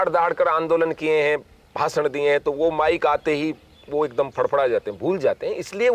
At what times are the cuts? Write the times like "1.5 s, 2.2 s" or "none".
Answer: none